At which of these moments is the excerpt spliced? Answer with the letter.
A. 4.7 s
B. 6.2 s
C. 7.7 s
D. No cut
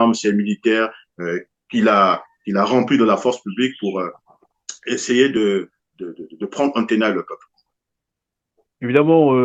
D